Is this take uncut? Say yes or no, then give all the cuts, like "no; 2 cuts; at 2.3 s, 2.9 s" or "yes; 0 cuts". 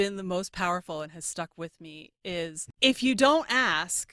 no; 1 cut; at 2.6 s